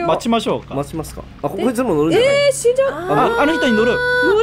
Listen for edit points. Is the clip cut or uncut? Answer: uncut